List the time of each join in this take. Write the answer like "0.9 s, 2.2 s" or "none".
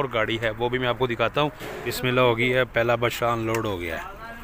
1.9 s